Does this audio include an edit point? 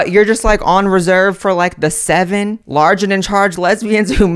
yes; 1 cut; at 2.6 s

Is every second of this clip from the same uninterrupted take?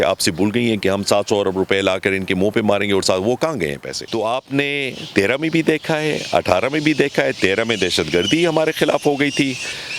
no; 1 cut; at 3.9 s

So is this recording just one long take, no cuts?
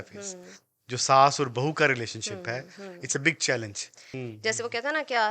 no; 1 cut; at 4.1 s

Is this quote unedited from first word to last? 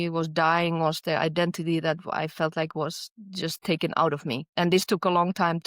no; 1 cut; at 4.5 s

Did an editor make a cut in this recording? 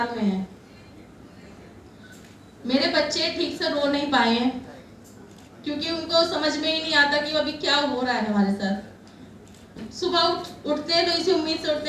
yes; 1 cut; at 9.8 s

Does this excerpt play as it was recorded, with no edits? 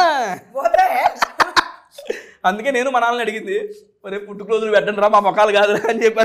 yes; 0 cuts

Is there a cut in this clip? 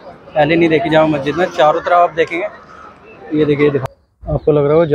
yes; 1 cut; at 3.8 s

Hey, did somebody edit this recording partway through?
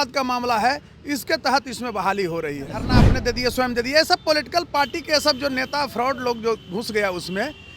yes; 1 cut; at 2.9 s

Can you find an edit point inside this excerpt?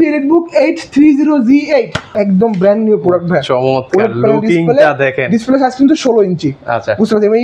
yes; 1 cut; at 2.0 s

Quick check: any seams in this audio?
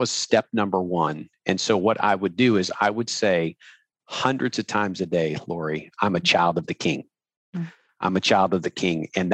no; 0 cuts

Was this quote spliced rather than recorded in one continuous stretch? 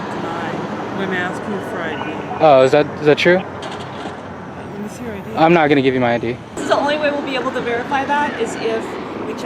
yes; 1 cut; at 6.6 s

